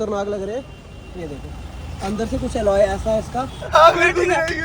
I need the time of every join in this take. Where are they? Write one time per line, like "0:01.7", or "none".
0:03.7